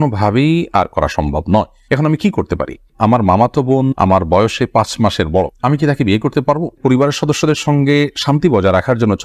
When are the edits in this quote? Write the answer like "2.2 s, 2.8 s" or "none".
2.9 s, 6.8 s